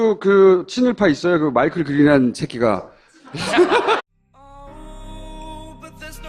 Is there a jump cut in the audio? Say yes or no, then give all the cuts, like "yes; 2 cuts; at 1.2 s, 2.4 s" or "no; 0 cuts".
no; 0 cuts